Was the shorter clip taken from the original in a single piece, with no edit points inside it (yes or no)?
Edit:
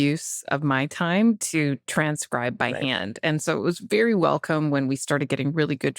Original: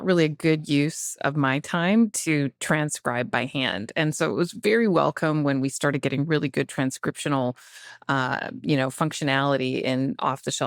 yes